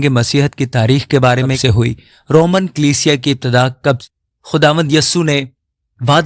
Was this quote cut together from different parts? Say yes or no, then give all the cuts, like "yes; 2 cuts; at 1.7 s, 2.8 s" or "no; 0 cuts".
yes; 2 cuts; at 1.6 s, 4.0 s